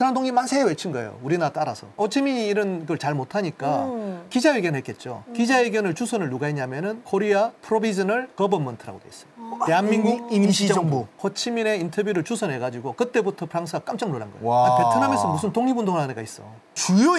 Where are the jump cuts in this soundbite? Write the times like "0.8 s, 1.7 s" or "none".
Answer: 1.9 s, 11.1 s